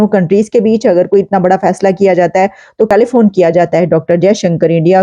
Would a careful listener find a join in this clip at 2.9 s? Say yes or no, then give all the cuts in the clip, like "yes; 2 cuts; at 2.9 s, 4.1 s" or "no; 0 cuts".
yes; 1 cut; at 2.9 s